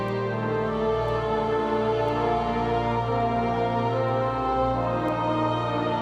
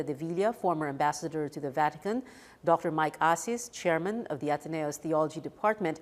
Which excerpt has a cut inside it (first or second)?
second